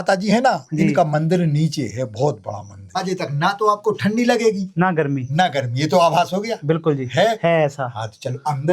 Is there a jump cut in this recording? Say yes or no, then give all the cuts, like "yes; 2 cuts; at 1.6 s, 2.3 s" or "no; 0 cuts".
yes; 1 cut; at 3.0 s